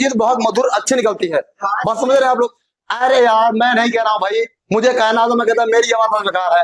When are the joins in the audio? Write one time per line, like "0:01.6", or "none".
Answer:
none